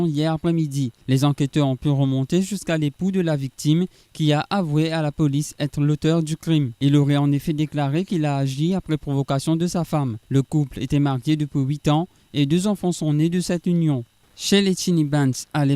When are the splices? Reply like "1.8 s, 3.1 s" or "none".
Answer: 14.4 s